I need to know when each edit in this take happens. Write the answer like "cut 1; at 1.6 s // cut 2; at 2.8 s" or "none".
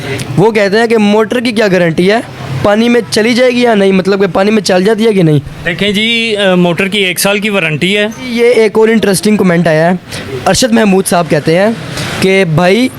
cut 1; at 8.3 s